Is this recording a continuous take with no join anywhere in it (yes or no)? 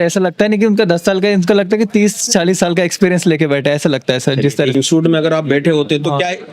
no